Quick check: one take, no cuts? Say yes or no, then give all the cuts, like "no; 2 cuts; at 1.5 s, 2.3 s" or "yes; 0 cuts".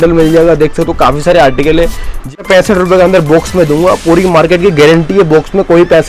no; 1 cut; at 2.3 s